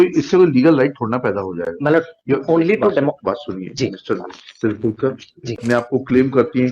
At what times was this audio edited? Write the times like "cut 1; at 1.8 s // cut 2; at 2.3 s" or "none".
cut 1; at 5.6 s